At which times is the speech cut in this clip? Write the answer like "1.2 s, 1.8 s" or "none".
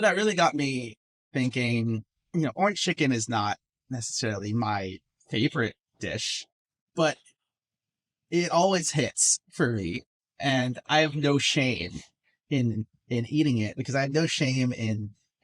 1.2 s